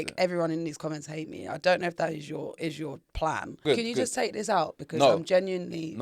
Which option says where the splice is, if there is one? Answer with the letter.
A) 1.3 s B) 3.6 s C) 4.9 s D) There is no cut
B